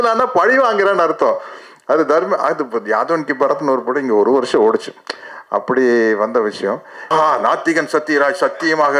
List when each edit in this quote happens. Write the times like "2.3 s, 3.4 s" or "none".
7.1 s